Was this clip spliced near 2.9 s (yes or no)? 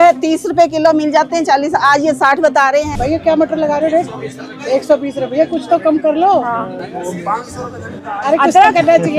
yes